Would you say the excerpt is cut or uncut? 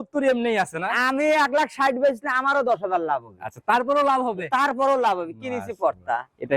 uncut